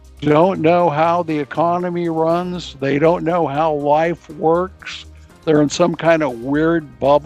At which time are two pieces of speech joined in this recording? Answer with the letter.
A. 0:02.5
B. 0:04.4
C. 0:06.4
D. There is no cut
C